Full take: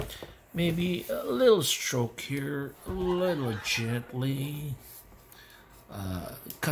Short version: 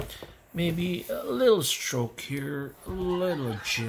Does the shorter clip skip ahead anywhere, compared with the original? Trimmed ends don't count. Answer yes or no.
no